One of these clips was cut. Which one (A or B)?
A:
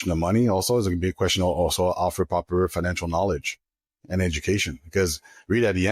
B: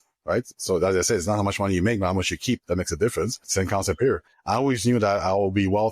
B